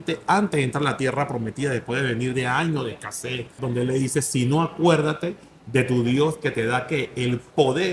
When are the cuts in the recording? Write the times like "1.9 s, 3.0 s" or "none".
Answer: 3.6 s